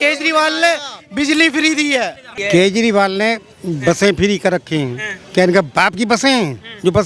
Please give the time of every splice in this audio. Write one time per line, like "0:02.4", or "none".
0:02.3